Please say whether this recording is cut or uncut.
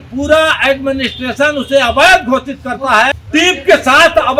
cut